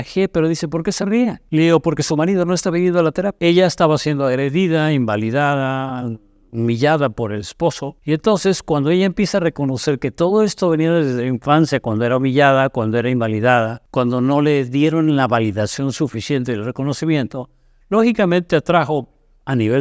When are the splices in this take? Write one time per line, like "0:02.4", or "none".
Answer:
0:01.4
0:03.4
0:07.9
0:13.8